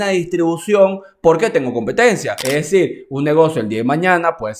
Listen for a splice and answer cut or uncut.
cut